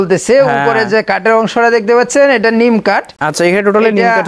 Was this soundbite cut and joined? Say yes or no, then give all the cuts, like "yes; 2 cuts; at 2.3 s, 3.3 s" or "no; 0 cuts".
no; 0 cuts